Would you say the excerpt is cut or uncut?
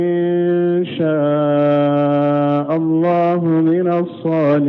uncut